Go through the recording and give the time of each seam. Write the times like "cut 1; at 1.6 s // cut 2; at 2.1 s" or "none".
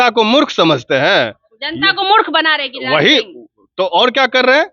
none